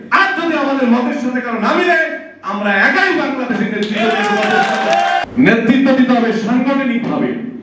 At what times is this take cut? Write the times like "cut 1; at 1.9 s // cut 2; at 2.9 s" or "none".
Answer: cut 1; at 5.2 s